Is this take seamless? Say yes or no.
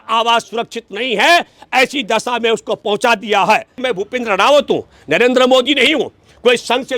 no